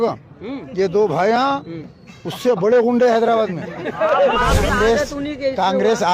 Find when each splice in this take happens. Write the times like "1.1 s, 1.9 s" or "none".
4.7 s